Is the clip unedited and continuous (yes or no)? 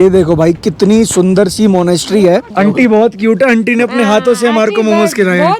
no